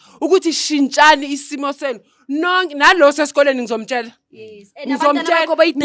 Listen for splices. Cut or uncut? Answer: uncut